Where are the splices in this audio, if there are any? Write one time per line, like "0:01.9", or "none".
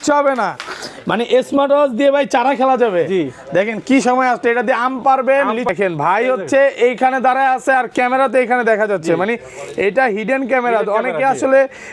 0:05.7